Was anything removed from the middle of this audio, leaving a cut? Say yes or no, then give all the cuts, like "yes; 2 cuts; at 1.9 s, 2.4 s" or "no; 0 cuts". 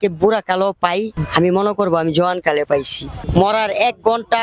yes; 2 cuts; at 1.2 s, 3.2 s